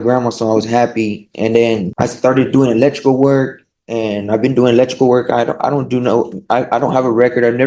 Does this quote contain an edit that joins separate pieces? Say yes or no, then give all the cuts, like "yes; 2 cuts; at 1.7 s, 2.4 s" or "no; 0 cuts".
yes; 1 cut; at 1.9 s